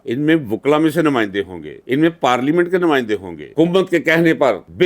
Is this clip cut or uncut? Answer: cut